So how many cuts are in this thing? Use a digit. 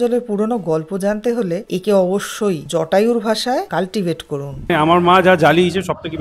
1